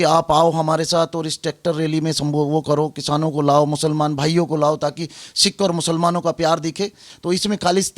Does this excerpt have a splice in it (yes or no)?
yes